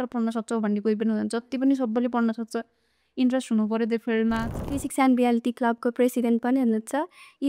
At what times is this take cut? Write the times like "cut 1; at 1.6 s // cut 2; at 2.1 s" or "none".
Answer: cut 1; at 4.7 s